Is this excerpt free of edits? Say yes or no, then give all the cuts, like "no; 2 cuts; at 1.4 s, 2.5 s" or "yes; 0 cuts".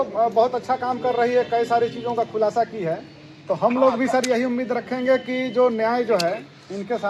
yes; 0 cuts